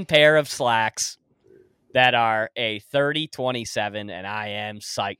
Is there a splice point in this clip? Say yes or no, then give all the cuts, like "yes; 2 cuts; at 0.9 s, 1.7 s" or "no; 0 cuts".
no; 0 cuts